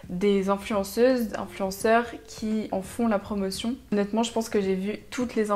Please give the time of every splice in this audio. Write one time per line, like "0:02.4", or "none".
none